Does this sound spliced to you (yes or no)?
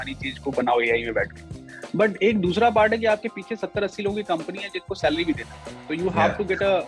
no